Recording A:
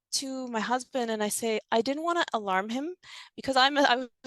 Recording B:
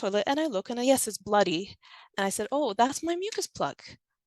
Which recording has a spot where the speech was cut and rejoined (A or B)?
A